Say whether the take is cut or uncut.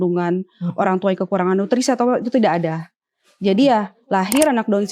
uncut